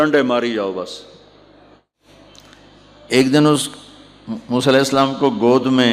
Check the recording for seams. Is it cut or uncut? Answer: cut